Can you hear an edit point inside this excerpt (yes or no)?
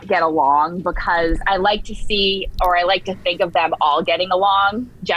no